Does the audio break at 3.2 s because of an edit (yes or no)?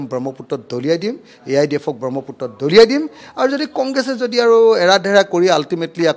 no